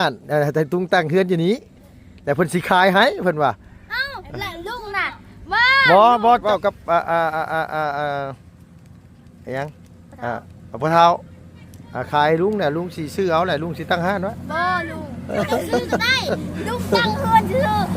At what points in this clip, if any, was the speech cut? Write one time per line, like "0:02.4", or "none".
0:06.4